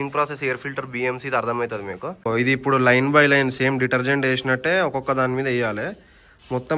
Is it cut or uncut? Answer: cut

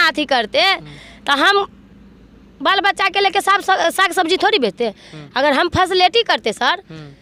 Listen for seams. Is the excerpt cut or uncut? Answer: uncut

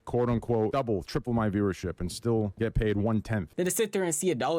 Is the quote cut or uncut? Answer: cut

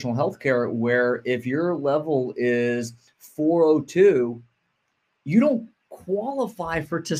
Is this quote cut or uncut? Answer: uncut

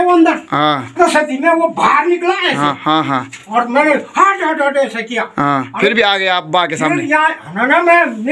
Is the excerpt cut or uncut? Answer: cut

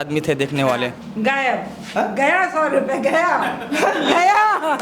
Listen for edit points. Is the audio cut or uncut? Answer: cut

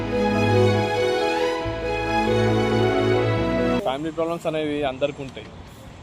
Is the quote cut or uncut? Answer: cut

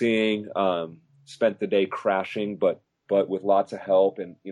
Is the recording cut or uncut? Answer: uncut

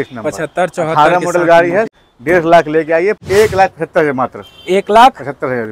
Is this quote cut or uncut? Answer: cut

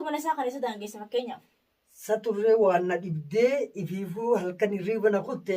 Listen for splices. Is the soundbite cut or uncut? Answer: uncut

